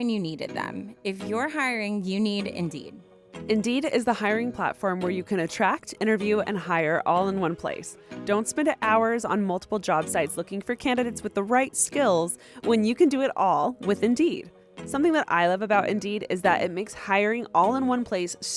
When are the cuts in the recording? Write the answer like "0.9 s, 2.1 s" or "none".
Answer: 14.8 s